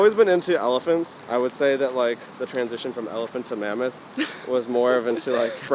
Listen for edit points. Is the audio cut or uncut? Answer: uncut